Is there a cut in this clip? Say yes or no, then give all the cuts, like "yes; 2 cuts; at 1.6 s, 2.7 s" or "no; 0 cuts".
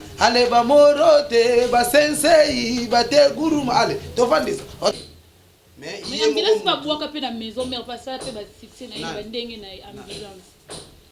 yes; 1 cut; at 4.9 s